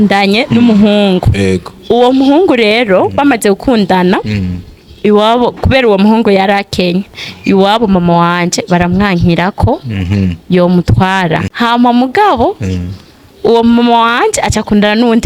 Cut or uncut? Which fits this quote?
cut